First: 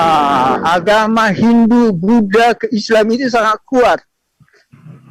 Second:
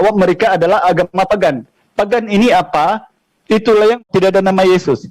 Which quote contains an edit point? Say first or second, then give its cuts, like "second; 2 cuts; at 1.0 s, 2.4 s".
second; 1 cut; at 4.0 s